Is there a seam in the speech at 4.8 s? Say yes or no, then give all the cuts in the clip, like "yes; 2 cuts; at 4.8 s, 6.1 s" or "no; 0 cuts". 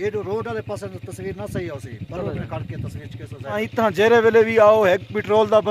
no; 1 cut; at 3.6 s